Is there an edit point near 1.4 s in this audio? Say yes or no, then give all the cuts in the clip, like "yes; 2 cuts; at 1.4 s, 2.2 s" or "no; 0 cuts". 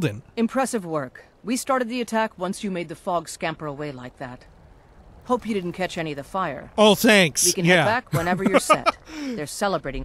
no; 0 cuts